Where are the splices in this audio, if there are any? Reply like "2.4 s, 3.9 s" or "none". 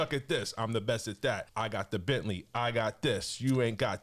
1.5 s